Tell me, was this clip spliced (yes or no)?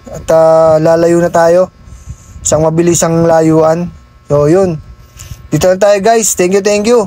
no